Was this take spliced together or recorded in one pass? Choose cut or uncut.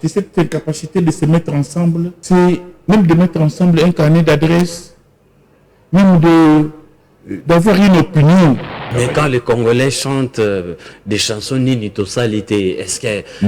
cut